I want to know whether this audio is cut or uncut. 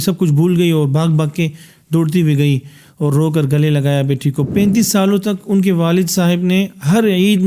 cut